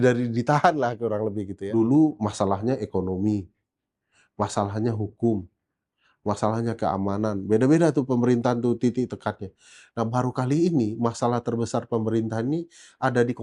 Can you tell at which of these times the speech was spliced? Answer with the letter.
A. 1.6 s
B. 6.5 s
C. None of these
A